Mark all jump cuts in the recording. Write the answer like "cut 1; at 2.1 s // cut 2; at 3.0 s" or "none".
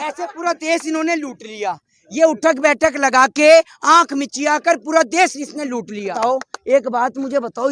cut 1; at 6.1 s